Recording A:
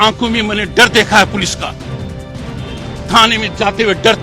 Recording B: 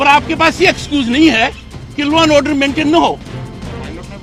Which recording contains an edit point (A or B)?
A